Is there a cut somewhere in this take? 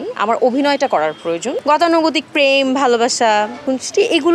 yes; 1 cut; at 1.5 s

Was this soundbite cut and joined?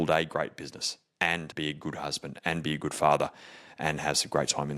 yes; 1 cut; at 1.5 s

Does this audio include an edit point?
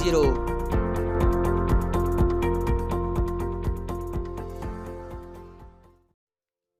no; 0 cuts

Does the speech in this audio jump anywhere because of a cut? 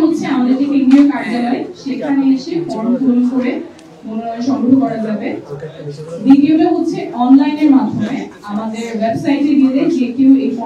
no; 0 cuts

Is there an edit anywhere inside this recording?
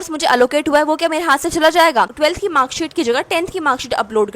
yes; 1 cut; at 2.1 s

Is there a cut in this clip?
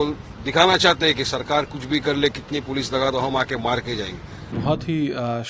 yes; 1 cut; at 4.6 s

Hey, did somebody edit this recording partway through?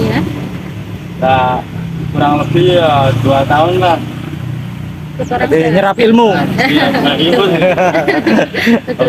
no; 0 cuts

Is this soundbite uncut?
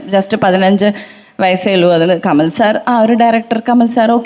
yes; 0 cuts

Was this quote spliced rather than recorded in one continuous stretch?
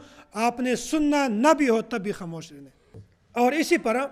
no; 0 cuts

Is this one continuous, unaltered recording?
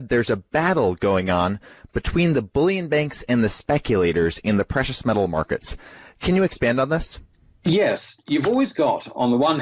no; 1 cut; at 2.6 s

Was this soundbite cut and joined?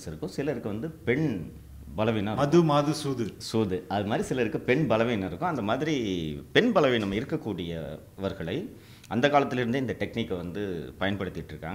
no; 0 cuts

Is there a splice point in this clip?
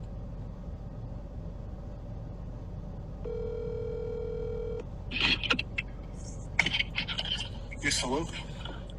yes; 1 cut; at 1.2 s

